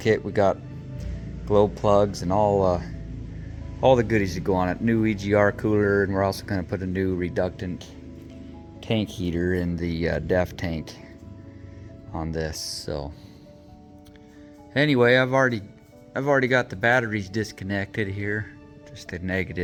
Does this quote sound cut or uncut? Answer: uncut